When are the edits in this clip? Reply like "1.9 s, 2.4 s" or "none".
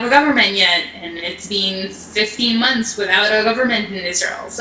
none